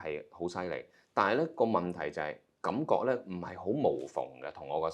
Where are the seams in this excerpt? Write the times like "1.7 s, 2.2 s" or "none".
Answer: none